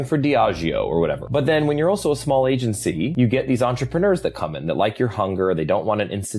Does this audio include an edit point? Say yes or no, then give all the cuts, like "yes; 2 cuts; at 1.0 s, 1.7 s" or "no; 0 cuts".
yes; 2 cuts; at 1.2 s, 3.1 s